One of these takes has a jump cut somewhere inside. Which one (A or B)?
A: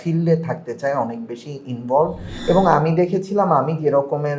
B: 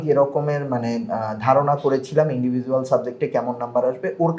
A